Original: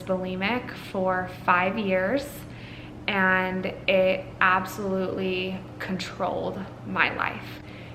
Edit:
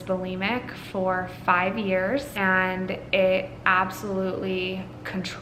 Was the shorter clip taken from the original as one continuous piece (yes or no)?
no